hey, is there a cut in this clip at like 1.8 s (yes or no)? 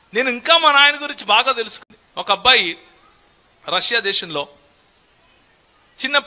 yes